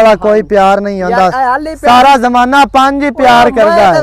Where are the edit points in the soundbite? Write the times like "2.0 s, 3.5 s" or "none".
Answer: none

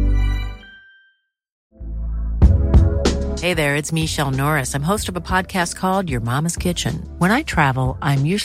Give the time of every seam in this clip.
1.5 s

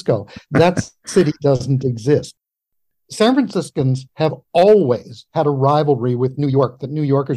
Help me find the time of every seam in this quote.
2.3 s

